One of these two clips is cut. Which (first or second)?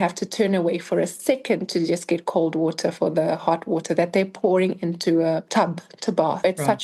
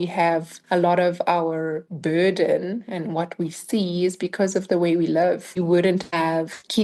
second